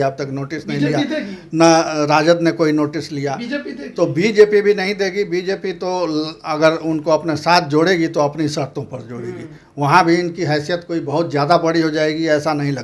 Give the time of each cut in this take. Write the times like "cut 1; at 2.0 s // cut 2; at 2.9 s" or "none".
none